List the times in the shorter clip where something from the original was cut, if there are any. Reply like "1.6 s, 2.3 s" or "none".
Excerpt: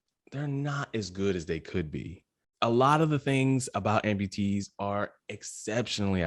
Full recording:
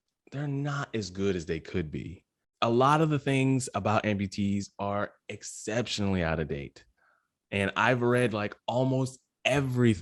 none